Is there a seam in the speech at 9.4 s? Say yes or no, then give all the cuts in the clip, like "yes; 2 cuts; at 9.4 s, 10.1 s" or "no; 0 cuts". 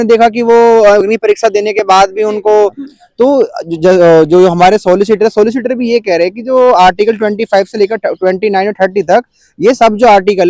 no; 1 cut; at 2.8 s